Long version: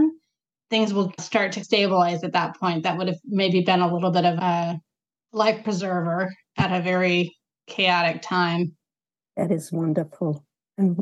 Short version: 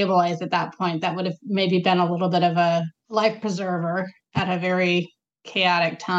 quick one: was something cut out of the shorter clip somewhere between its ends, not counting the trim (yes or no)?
yes